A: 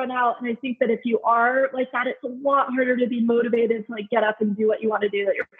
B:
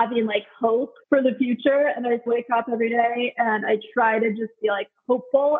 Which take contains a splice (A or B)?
B